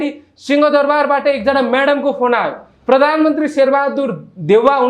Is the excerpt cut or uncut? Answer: uncut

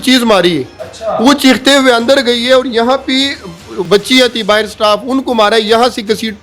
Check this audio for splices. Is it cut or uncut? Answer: cut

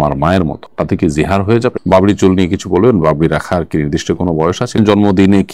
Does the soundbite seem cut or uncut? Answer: cut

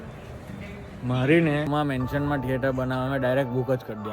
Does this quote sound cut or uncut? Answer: cut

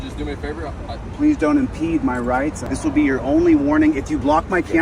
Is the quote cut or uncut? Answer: cut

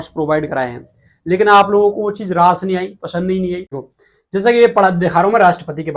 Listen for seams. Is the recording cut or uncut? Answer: cut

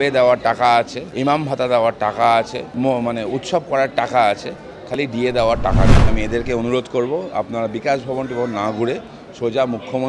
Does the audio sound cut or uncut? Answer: cut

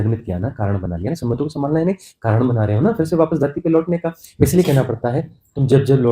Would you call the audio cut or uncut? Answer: cut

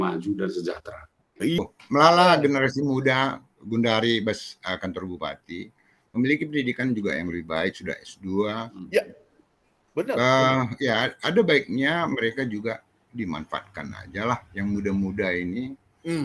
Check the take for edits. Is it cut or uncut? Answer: cut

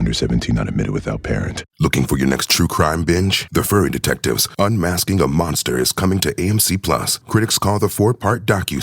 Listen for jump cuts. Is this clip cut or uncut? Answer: cut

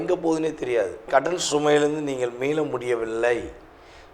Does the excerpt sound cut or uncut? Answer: cut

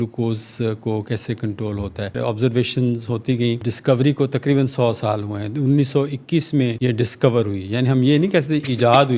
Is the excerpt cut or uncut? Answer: cut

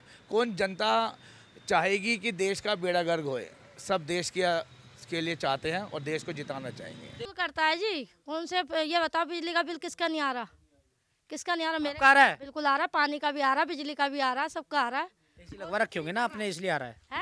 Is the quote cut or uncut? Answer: cut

